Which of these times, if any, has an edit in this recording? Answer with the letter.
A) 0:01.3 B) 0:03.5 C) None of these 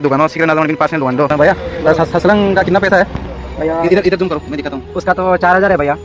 A